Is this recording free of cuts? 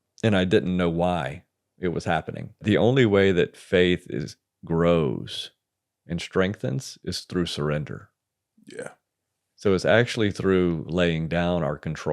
no; 1 cut; at 2.6 s

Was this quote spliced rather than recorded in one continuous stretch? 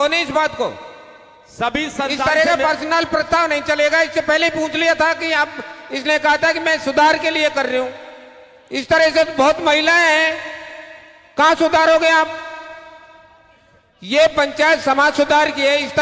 no; 0 cuts

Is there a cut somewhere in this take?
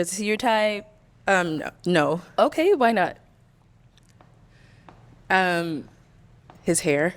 no; 0 cuts

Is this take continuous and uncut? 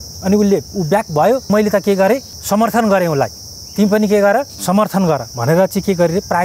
no; 3 cuts; at 1.5 s, 2.3 s, 4.5 s

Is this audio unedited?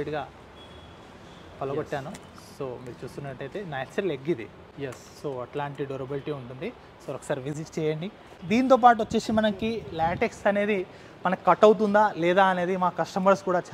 yes; 0 cuts

